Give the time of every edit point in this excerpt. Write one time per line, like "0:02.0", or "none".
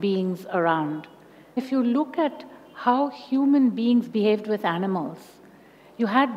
0:01.6